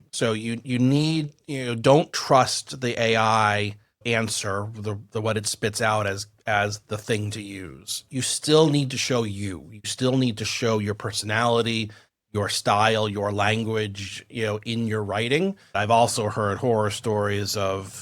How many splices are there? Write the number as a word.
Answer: three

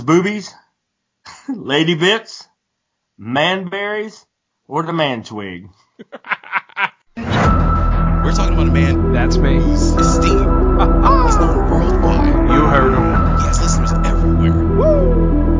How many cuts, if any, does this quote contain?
one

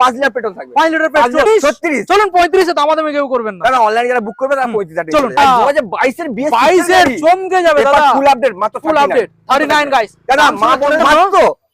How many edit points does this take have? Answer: three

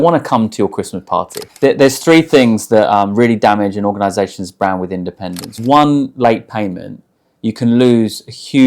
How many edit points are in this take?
two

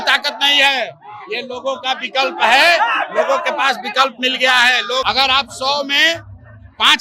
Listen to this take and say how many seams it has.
one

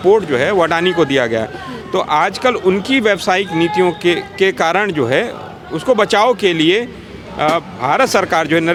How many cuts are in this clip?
zero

